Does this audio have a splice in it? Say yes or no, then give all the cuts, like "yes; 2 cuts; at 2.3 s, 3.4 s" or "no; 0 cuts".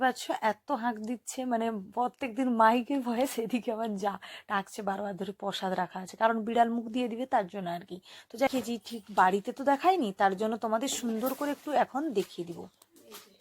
yes; 1 cut; at 8.5 s